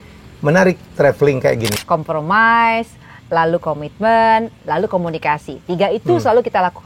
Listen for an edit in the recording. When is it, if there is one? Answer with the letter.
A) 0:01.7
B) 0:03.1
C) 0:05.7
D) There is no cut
A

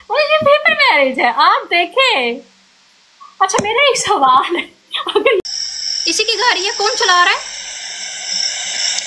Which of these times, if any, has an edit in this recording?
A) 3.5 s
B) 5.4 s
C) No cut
B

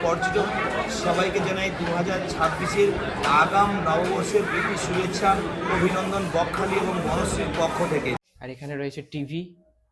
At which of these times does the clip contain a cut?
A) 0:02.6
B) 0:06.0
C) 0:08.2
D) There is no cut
C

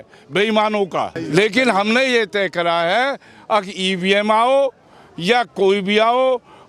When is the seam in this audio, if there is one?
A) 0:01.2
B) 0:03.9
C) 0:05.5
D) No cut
A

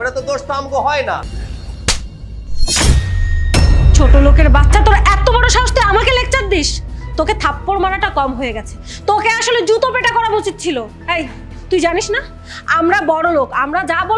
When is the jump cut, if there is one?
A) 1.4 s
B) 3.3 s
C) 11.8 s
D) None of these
A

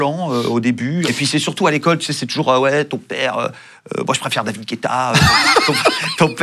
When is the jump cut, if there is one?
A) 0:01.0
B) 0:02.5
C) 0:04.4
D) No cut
A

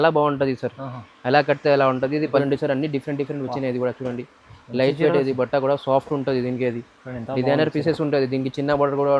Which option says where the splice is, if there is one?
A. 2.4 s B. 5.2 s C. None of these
A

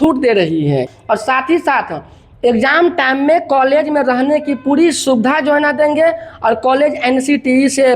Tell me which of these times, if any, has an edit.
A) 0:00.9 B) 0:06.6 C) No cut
A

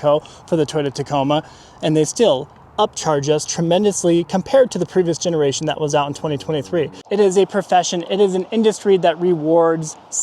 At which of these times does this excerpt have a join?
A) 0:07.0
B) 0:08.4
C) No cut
A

